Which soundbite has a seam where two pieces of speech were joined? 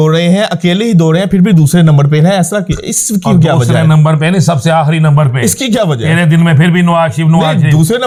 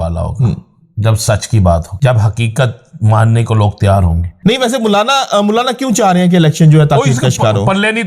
second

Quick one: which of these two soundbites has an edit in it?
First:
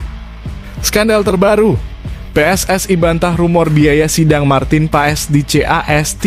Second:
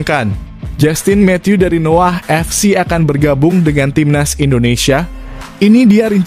first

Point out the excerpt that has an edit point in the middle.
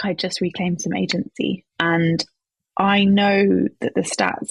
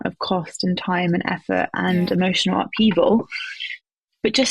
first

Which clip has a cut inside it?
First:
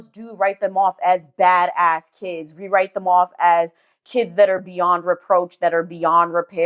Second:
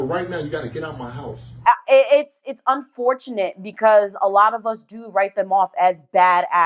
second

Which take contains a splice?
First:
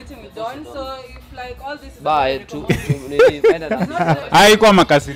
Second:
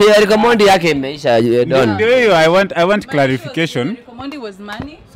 first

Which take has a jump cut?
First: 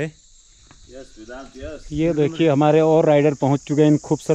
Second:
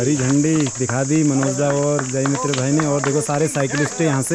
first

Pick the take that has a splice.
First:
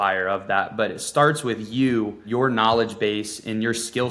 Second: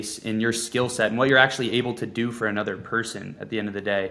first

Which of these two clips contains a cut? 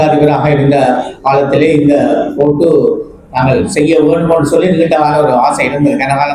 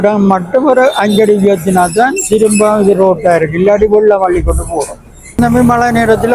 second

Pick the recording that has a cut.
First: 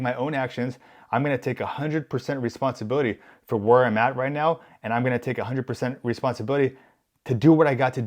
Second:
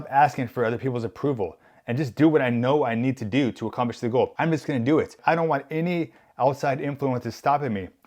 second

